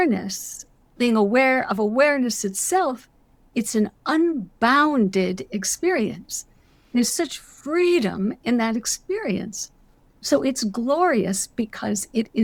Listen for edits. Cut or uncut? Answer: uncut